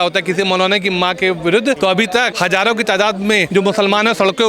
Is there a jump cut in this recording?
yes; 2 cuts; at 2.0 s, 3.5 s

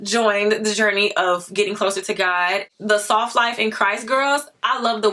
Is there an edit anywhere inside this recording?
yes; 1 cut; at 2.7 s

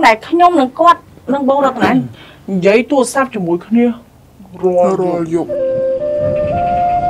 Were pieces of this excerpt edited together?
no; 0 cuts

